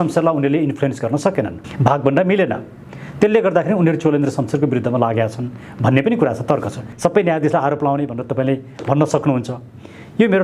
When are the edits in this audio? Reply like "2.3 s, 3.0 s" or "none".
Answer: 6.9 s